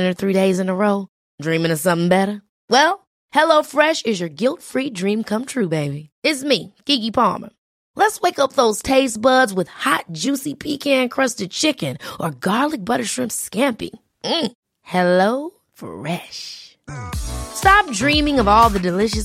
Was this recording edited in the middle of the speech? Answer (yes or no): no